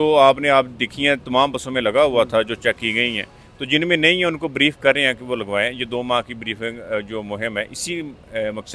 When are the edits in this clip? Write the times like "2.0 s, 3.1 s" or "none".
none